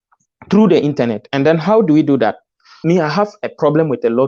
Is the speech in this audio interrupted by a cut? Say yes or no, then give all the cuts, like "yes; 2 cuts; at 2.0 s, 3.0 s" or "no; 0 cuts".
yes; 1 cut; at 2.8 s